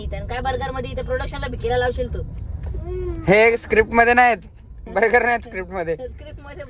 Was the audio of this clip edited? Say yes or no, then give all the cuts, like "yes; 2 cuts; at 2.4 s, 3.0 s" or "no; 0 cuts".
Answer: no; 0 cuts